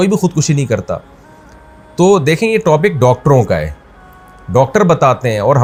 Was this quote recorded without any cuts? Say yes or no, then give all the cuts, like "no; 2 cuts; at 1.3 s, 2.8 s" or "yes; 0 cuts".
yes; 0 cuts